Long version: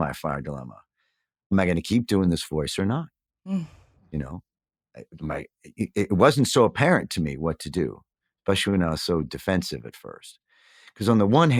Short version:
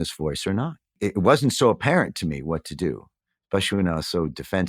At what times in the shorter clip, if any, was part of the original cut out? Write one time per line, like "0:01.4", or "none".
0:01.0